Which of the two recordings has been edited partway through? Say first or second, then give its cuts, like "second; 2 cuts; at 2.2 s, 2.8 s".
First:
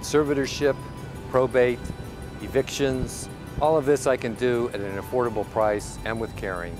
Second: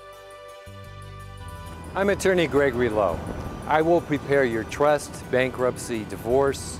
second; 1 cut; at 1.4 s